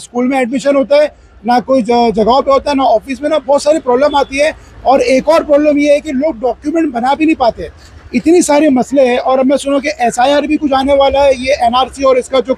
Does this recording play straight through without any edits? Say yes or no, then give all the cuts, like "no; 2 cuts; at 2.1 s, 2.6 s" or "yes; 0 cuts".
yes; 0 cuts